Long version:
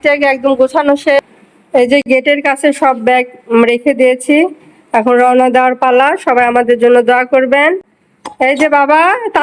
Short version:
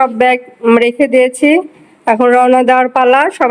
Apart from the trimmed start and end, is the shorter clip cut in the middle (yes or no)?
no